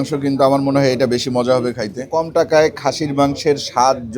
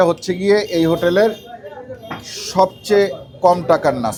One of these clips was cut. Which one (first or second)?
first